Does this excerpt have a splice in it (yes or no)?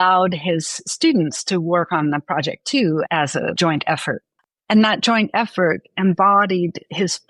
no